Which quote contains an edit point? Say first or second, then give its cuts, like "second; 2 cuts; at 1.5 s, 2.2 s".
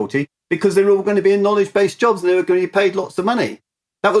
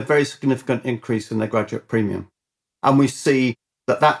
second; 1 cut; at 2.7 s